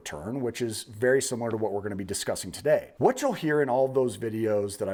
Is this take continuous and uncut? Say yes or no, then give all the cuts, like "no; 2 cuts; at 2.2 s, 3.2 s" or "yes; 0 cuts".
yes; 0 cuts